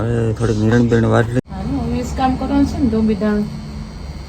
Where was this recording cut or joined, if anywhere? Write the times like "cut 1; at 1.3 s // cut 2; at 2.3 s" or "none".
cut 1; at 1.4 s